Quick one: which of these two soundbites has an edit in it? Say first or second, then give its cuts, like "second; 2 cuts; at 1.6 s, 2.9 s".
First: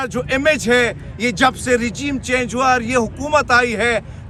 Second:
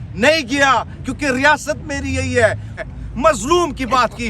second; 1 cut; at 2.8 s